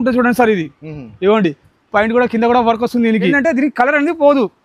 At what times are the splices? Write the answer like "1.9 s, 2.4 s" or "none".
3.4 s